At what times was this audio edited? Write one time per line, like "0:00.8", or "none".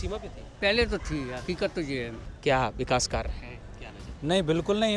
0:02.2